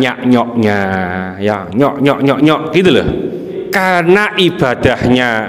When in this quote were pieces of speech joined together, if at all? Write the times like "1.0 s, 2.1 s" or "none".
3.6 s